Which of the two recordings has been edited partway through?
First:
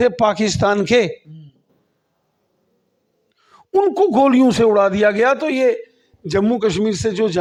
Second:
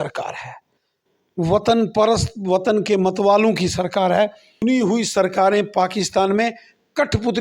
second; 1 cut; at 4.6 s

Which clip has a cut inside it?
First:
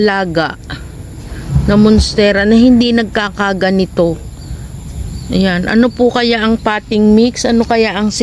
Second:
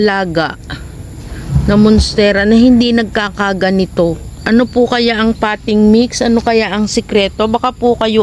second; 1 cut; at 4.4 s

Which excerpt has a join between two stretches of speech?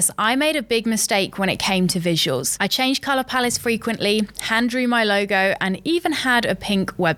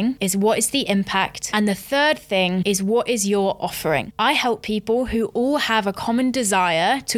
second; 3 cuts; at 1.4 s, 2.6 s, 4.1 s

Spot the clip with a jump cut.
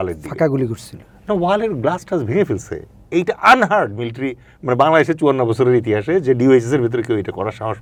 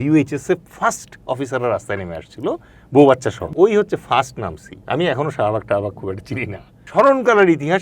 second; 2 cuts; at 3.5 s, 6.9 s

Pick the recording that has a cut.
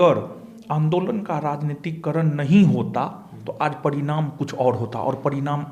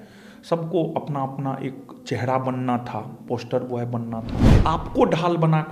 second; 1 cut; at 4.4 s

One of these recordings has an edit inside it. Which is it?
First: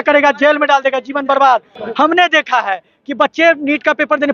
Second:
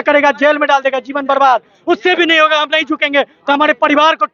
first; 1 cut; at 1.7 s

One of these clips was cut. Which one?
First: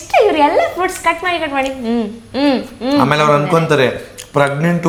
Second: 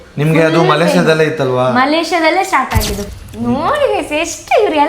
second; 1 cut; at 3.0 s

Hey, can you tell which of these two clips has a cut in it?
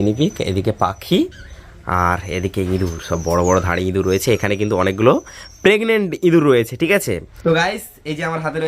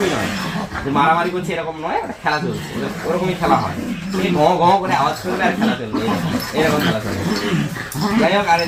first; 1 cut; at 7.4 s

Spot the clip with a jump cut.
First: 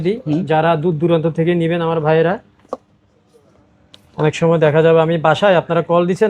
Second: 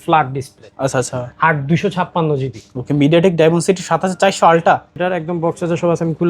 second; 1 cut; at 4.9 s

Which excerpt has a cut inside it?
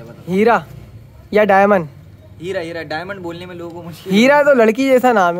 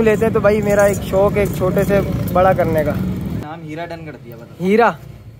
second; 1 cut; at 3.4 s

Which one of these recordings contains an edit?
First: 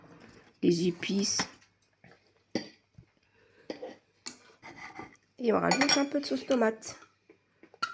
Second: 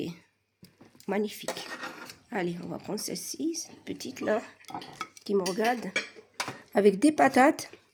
first; 1 cut; at 4.7 s

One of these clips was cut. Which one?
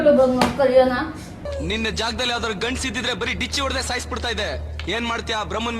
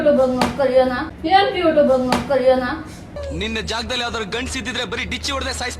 first; 1 cut; at 1.1 s

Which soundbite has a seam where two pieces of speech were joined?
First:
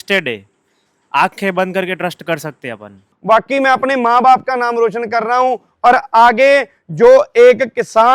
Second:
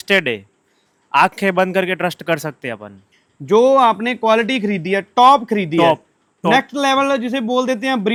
first; 1 cut; at 3.1 s

